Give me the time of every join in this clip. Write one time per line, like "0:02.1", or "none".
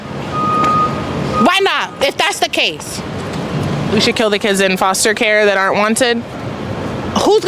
none